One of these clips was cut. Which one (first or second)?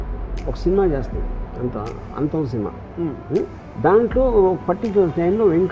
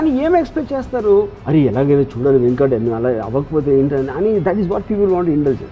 first